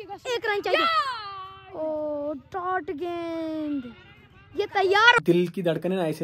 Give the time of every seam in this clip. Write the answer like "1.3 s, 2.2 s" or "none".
5.2 s